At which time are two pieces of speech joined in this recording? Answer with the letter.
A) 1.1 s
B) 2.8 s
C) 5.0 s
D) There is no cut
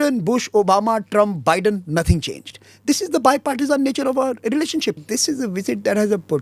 C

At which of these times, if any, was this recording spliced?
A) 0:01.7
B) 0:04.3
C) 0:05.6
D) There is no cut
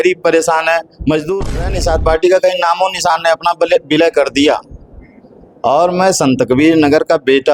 A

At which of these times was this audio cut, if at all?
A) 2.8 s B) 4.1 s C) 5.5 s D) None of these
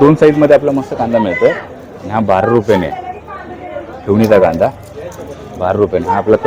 D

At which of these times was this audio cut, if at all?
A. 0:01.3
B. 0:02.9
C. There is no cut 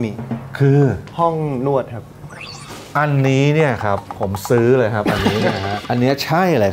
C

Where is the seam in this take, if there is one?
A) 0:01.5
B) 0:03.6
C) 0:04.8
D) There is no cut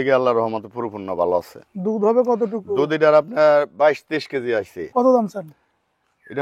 C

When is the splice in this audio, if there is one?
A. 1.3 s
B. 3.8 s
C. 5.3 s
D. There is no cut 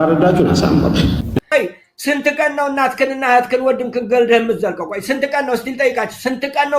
A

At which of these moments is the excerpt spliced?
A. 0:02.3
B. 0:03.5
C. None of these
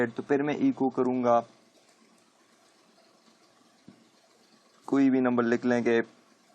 B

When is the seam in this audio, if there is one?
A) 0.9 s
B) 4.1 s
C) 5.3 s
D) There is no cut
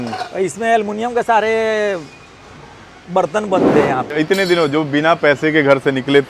B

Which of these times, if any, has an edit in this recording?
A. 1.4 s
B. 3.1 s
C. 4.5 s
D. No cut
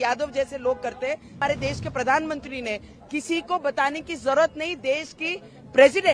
A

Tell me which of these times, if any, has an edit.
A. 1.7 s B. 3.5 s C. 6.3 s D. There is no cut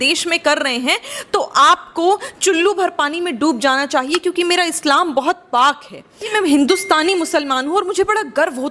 C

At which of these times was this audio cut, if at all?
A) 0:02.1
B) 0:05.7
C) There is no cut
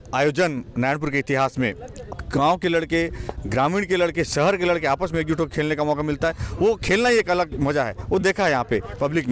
A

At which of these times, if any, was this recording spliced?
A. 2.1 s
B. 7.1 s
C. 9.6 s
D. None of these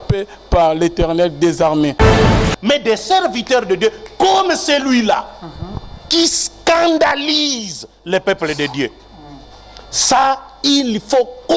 A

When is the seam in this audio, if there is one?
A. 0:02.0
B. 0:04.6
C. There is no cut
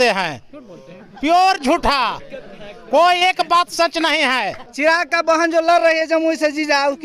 B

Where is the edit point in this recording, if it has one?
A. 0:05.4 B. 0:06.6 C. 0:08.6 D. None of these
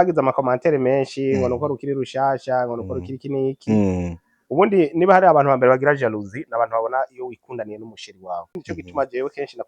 C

